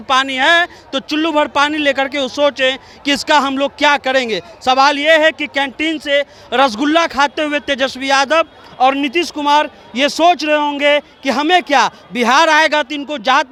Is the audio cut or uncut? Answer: uncut